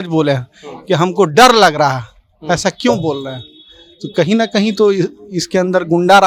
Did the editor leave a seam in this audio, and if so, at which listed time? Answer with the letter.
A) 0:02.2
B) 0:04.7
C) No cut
C